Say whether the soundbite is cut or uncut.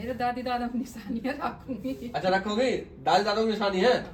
uncut